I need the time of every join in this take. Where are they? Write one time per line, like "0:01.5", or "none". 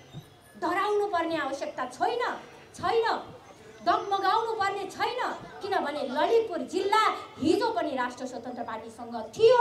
none